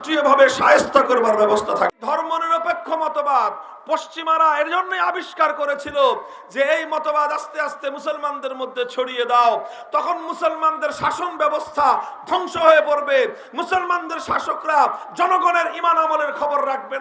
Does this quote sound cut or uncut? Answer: cut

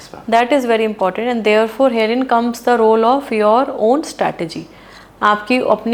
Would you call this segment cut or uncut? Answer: uncut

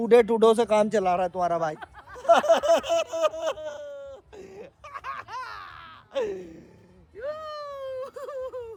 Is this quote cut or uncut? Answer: uncut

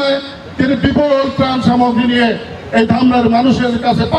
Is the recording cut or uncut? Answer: uncut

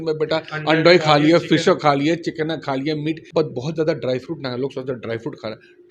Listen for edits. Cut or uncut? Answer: cut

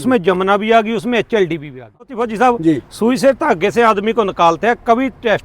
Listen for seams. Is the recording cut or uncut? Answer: cut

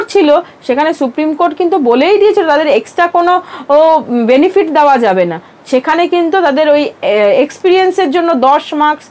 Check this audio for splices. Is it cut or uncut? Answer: uncut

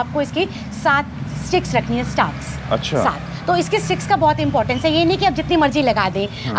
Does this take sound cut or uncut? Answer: uncut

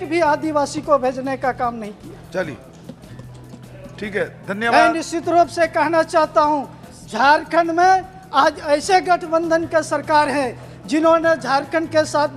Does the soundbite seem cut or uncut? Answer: uncut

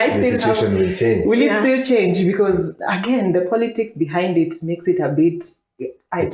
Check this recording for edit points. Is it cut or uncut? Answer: uncut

